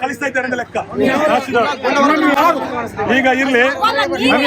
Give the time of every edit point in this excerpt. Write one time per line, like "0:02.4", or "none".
none